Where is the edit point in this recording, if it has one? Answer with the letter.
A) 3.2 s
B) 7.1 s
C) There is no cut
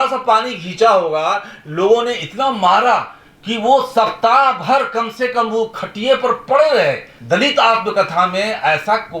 B